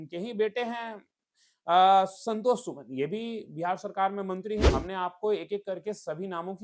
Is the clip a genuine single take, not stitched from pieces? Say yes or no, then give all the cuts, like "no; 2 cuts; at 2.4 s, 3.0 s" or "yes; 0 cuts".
no; 1 cut; at 4.7 s